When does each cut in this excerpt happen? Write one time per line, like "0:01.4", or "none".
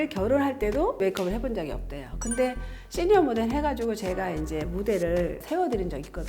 0:01.0
0:05.4